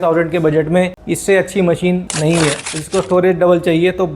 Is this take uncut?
no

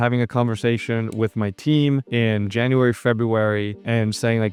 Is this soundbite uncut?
yes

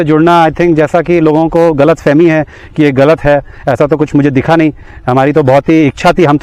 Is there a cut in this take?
no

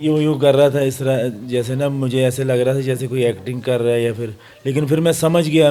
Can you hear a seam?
no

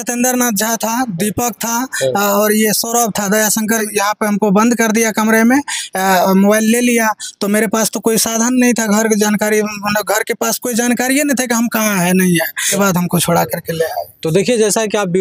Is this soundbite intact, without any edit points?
no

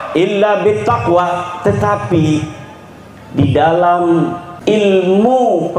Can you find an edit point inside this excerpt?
yes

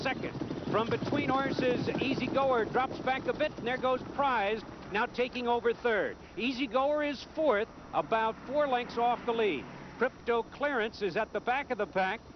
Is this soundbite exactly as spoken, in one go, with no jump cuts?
yes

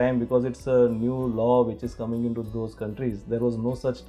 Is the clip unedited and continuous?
yes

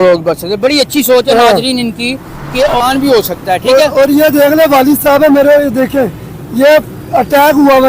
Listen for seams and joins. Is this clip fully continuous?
no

